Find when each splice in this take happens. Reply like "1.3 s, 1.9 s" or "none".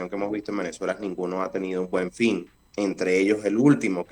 2.6 s